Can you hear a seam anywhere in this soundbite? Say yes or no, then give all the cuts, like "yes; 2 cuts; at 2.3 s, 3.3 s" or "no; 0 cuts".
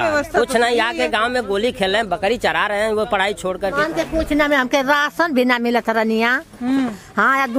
yes; 1 cut; at 3.8 s